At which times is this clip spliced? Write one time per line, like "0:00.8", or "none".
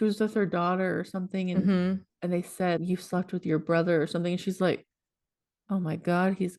0:02.4